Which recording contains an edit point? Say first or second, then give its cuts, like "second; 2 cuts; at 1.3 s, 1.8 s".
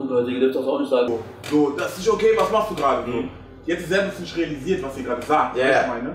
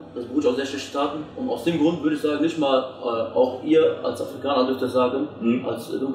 first; 1 cut; at 1.1 s